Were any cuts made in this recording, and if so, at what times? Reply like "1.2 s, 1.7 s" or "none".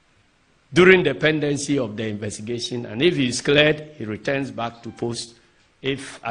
none